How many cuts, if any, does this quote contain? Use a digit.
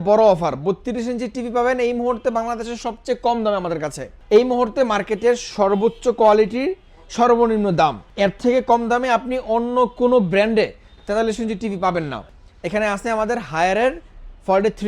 2